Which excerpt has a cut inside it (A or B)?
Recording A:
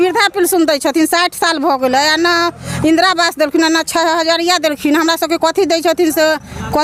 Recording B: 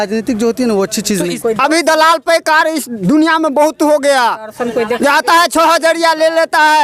B